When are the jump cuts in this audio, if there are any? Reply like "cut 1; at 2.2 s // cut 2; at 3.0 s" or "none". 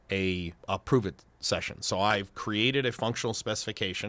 cut 1; at 2.1 s